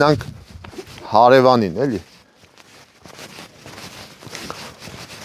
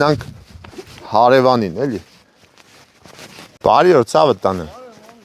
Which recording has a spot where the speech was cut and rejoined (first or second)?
second